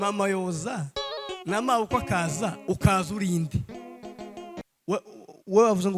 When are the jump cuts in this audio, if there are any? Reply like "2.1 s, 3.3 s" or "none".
4.6 s